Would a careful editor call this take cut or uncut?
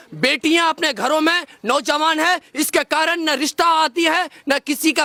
uncut